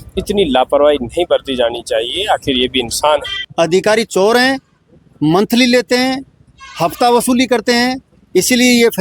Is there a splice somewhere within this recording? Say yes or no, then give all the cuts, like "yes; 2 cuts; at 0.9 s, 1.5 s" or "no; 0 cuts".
yes; 1 cut; at 3.4 s